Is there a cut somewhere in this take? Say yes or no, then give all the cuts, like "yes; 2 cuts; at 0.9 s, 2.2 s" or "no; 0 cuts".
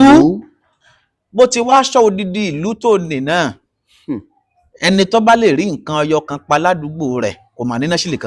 no; 0 cuts